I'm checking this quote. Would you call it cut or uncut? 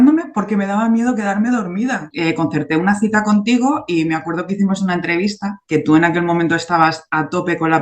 cut